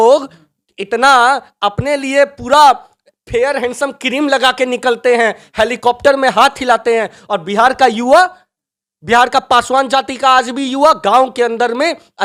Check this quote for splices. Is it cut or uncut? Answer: uncut